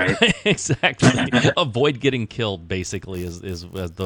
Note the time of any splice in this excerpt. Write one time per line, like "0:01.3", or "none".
none